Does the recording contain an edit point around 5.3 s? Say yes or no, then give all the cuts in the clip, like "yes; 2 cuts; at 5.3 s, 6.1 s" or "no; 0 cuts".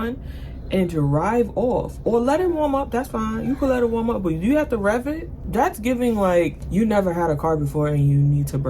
yes; 2 cuts; at 5.3 s, 6.6 s